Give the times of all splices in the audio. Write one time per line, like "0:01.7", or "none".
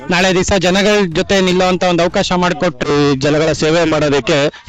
0:02.9